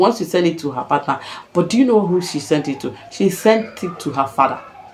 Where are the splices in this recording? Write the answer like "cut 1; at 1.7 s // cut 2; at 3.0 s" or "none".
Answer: none